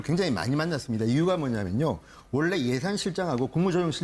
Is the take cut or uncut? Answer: uncut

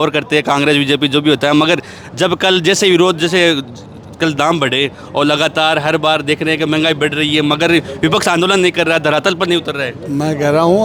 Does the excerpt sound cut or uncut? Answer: uncut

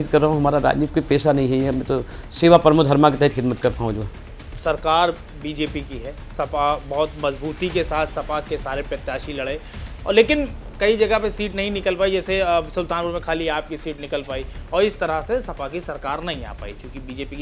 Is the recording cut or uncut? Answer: uncut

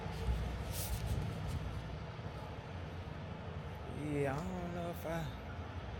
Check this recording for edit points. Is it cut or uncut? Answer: uncut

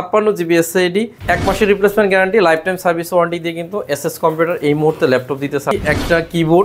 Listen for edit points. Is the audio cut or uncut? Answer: cut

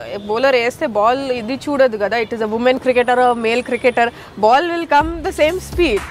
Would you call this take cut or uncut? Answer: uncut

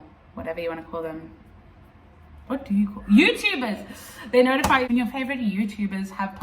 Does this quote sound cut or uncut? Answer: uncut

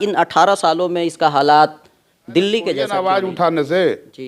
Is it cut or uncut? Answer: cut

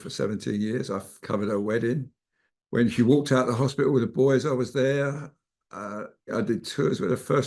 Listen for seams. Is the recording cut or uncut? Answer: cut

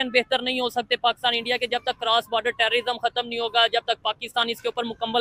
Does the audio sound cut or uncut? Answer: uncut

